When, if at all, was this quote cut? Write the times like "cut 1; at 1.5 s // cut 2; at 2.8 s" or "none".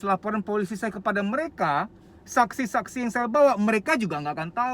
none